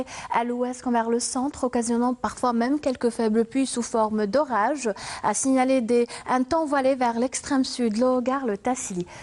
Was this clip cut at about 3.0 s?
yes; 1 cut; at 3.0 s

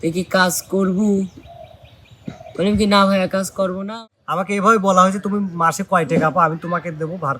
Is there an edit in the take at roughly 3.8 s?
yes; 1 cut; at 3.8 s

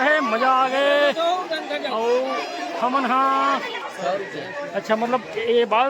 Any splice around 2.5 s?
no; 1 cut; at 3.8 s

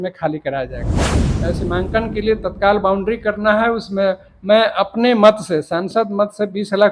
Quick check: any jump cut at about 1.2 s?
yes; 1 cut; at 1.2 s

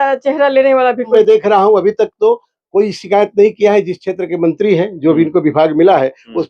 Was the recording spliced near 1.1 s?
yes; 1 cut; at 1.1 s

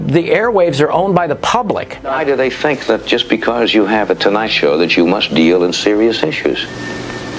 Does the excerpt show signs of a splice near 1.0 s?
no; 1 cut; at 2.2 s

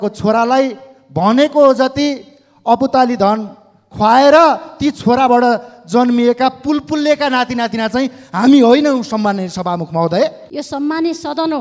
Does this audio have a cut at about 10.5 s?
yes; 1 cut; at 10.5 s

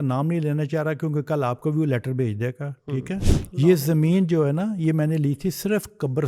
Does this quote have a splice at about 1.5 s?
no; 1 cut; at 3.4 s

